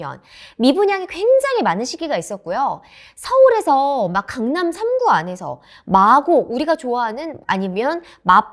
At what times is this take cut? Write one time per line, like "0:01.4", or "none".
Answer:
none